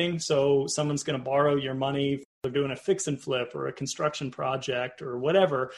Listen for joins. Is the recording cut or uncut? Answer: cut